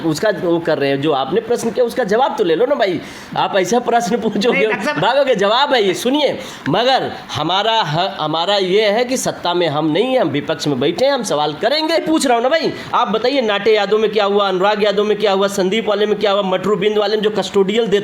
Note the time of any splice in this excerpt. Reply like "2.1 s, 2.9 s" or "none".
12.0 s